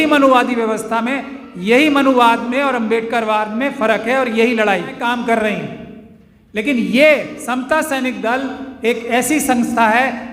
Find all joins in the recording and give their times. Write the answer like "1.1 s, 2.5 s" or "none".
5.0 s